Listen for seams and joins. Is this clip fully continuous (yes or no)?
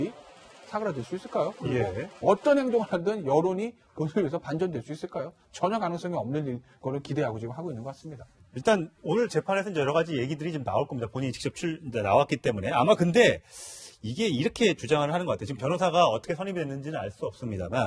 no